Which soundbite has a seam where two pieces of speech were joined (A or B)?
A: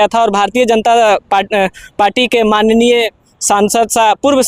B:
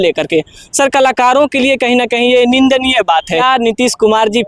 B